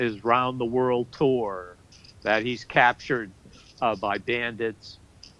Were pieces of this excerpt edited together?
no; 0 cuts

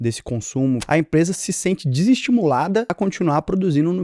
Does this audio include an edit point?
yes; 2 cuts; at 0.8 s, 2.9 s

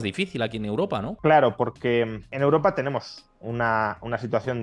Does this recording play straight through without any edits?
no; 2 cuts; at 1.1 s, 2.2 s

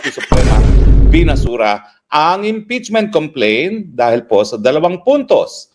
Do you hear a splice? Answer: no; 0 cuts

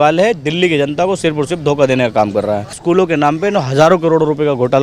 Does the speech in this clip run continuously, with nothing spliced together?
no; 1 cut; at 2.8 s

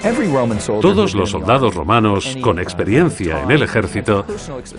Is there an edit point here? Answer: no; 0 cuts

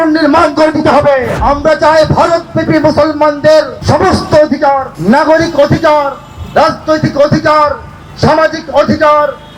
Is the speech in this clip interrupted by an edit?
yes; 3 cuts; at 1.4 s, 3.8 s, 4.9 s

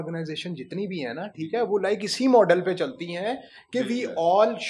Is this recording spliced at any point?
no; 0 cuts

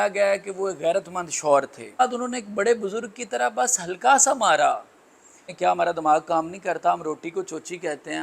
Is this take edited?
yes; 2 cuts; at 2.0 s, 5.5 s

